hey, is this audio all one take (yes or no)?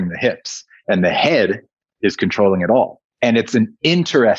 no